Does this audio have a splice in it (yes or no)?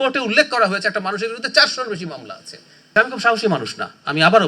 yes